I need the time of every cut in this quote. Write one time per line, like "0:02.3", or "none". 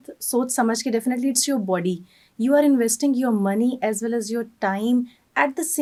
none

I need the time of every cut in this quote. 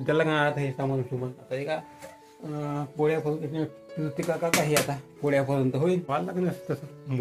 0:06.0

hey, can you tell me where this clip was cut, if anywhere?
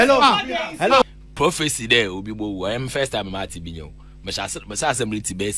0:01.0

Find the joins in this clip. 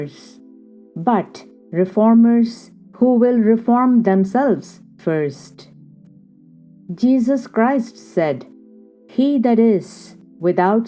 0:05.4
0:06.9

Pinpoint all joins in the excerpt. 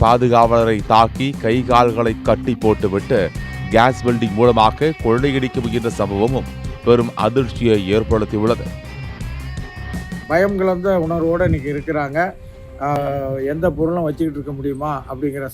0:13.0

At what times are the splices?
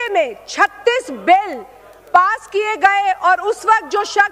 none

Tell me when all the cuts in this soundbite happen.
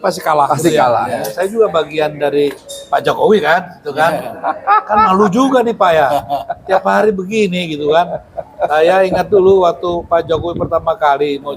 0:01.3

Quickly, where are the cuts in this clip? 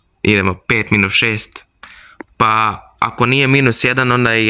none

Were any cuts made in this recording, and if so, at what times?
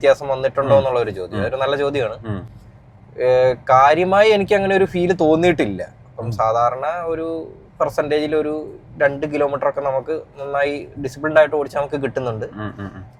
none

